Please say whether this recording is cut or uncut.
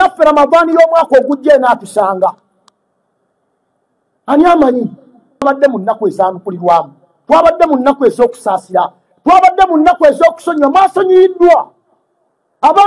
cut